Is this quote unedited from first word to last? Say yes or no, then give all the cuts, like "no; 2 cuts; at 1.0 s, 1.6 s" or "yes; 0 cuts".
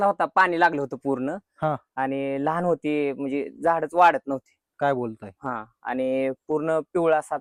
yes; 0 cuts